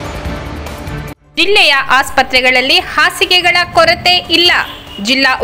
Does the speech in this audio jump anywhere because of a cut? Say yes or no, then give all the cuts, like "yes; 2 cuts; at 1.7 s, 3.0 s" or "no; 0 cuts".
yes; 1 cut; at 0.9 s